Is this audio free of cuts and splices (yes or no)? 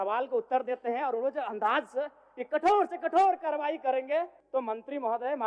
no